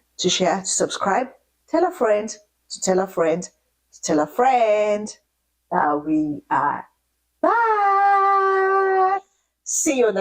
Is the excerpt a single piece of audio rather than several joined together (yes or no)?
yes